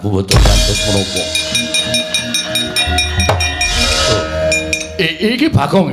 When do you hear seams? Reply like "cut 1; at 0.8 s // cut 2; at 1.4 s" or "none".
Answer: cut 1; at 3.7 s